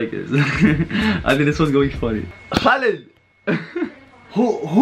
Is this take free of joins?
no; 1 cut; at 2.3 s

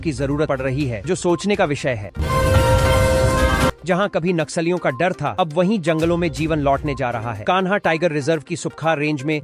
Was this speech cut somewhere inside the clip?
no; 0 cuts

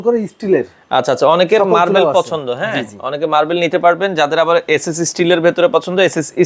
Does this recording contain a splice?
no; 0 cuts

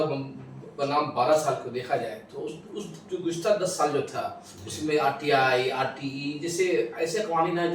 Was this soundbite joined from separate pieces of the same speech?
no; 0 cuts

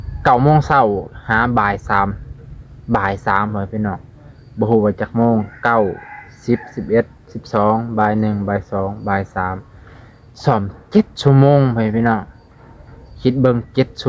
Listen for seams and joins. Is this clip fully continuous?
yes; 0 cuts

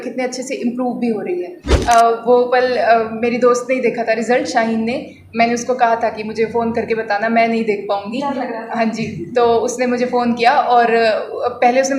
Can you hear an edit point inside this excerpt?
yes; 1 cut; at 1.6 s

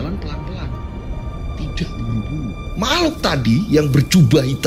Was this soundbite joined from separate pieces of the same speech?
no; 0 cuts

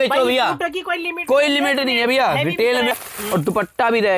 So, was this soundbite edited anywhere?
yes; 1 cut; at 2.9 s

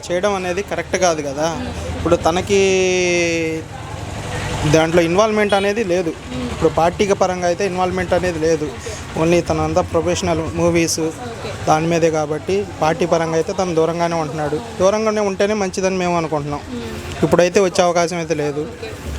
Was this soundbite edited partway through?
no; 0 cuts

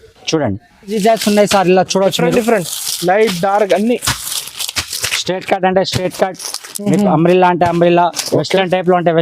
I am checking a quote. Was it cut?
yes; 1 cut; at 0.9 s

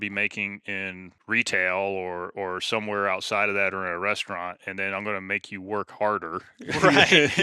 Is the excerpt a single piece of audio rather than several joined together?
no; 1 cut; at 1.1 s

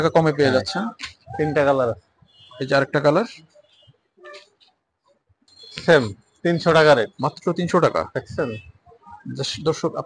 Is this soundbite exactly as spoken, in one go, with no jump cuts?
yes; 0 cuts

